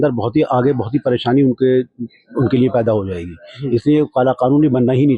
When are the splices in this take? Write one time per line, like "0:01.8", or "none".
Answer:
none